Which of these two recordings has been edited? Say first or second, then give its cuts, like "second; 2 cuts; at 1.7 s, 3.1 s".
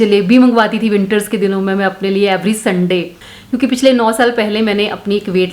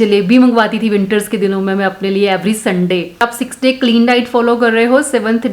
first; 1 cut; at 3.1 s